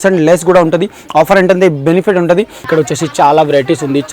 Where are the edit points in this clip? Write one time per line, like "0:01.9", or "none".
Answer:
none